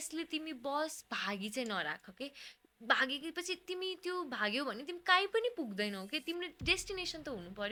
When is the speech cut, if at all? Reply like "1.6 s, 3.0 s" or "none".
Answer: none